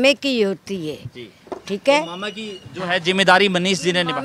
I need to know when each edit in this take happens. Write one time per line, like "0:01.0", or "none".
none